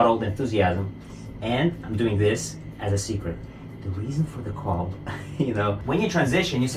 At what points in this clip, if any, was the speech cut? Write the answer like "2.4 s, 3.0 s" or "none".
5.8 s